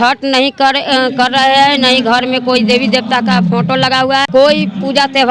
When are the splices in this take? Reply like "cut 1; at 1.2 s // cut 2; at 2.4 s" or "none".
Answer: cut 1; at 4.3 s